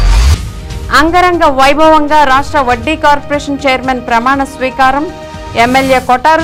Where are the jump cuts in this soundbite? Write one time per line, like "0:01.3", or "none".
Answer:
none